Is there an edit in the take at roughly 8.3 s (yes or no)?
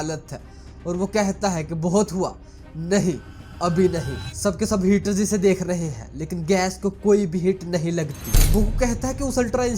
yes